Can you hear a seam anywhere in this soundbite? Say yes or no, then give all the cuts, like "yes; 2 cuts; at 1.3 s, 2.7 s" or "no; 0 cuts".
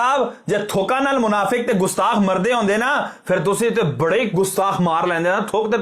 no; 0 cuts